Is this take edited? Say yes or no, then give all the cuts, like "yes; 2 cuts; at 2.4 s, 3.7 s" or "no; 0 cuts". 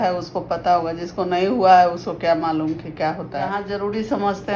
yes; 1 cut; at 3.6 s